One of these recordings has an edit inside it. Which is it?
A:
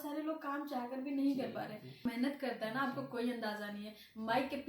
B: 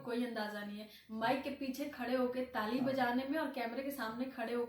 A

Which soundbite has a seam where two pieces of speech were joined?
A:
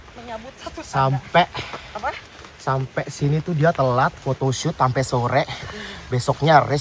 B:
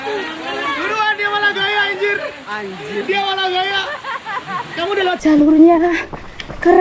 B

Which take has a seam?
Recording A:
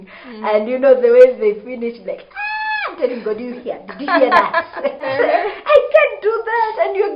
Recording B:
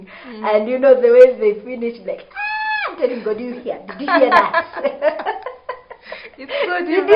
A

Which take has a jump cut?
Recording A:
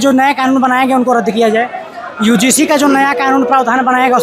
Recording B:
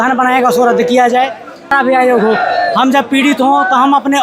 B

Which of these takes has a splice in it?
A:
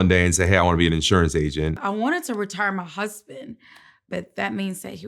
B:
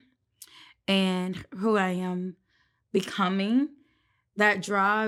A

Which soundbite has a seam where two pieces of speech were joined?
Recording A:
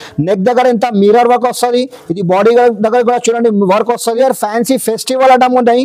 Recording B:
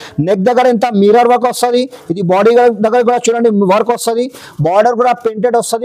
A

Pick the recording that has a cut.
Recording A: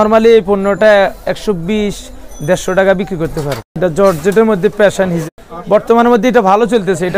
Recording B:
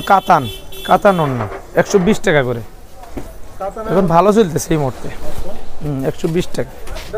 A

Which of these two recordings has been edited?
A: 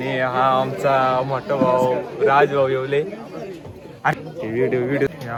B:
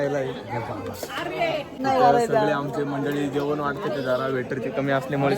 B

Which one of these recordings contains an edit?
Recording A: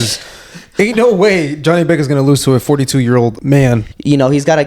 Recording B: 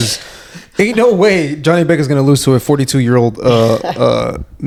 A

